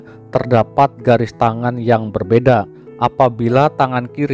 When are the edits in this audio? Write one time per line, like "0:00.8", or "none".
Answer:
0:02.8